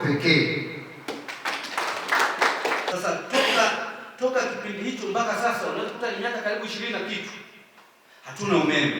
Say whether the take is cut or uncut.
cut